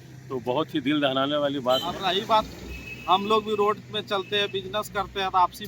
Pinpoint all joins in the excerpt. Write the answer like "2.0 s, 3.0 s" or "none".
2.0 s